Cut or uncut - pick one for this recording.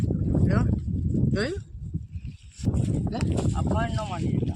cut